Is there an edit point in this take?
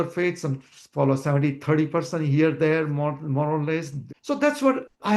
yes; 1 cut; at 4.0 s

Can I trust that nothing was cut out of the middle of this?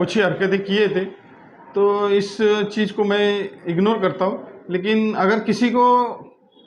yes; 0 cuts

